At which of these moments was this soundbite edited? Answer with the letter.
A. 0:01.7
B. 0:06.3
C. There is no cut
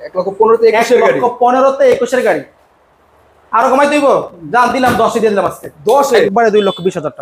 B